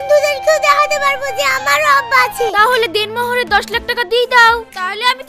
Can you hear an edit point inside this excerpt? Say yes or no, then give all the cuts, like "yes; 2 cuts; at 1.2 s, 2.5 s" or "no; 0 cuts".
yes; 1 cut; at 2.5 s